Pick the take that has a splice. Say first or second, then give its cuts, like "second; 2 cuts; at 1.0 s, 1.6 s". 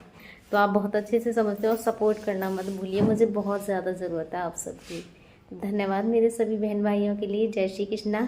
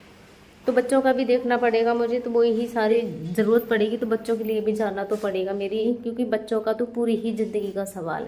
second; 2 cuts; at 3.0 s, 5.8 s